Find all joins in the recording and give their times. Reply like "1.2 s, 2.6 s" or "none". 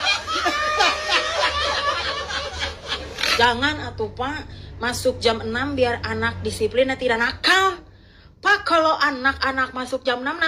3.2 s